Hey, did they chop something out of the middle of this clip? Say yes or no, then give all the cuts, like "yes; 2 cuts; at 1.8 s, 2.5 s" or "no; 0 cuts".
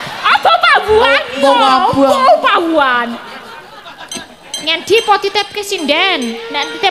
no; 0 cuts